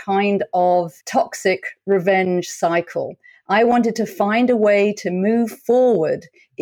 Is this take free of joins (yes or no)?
no